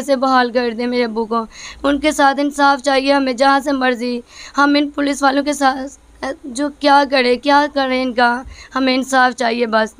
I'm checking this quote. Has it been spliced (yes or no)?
no